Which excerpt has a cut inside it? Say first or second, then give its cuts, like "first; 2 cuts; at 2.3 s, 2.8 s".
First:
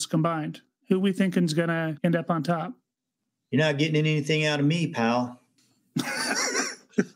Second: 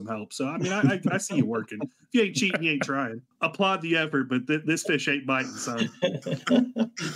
second; 1 cut; at 3.3 s